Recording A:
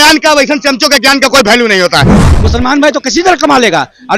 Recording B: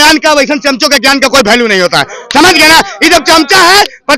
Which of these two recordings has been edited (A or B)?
A